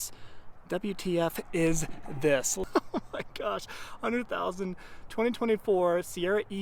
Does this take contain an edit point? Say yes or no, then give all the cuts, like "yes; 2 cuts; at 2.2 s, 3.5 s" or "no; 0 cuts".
yes; 1 cut; at 2.6 s